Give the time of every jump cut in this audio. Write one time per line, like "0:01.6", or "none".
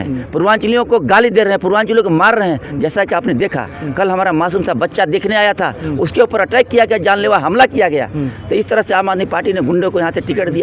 none